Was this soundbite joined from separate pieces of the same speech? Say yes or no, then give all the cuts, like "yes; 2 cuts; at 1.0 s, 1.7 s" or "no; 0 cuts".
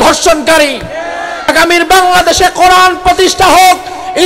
yes; 1 cut; at 1.5 s